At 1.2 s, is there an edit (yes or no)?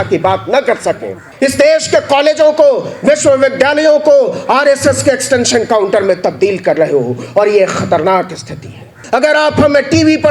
yes